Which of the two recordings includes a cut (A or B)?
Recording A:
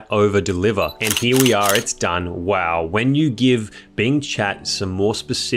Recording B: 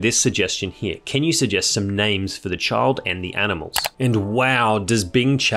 A